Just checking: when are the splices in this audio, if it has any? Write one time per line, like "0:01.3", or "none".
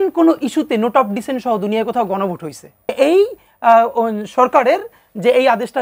0:02.9